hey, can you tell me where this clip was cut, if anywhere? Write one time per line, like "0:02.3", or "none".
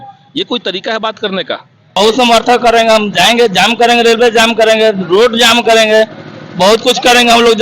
0:01.9

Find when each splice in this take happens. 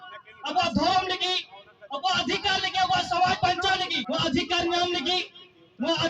0:04.0

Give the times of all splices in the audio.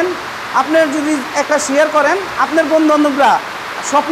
none

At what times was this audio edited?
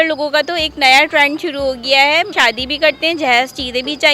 0:02.3

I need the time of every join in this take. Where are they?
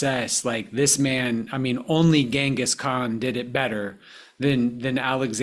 none

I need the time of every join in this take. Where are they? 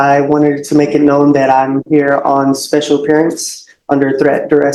none

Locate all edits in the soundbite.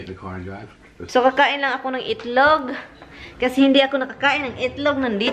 0:00.9

